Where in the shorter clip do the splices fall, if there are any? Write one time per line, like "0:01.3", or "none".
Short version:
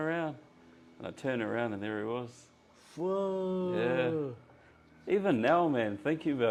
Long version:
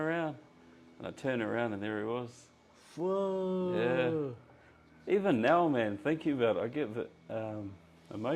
none